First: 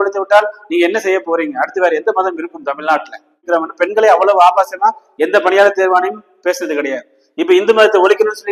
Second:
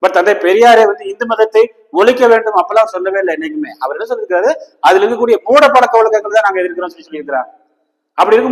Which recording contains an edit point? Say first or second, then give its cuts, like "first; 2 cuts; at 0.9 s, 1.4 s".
first; 1 cut; at 3.5 s